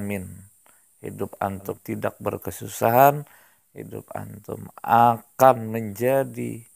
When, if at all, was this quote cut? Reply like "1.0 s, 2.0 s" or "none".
1.8 s